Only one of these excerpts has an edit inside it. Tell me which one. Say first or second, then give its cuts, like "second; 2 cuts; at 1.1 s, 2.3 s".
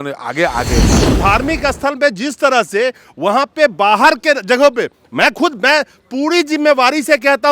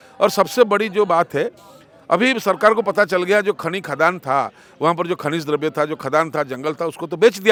first; 1 cut; at 1.0 s